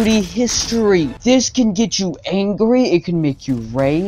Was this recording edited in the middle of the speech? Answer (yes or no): yes